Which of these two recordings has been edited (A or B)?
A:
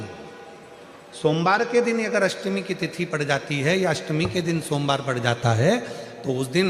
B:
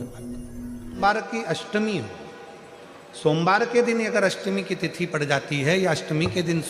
B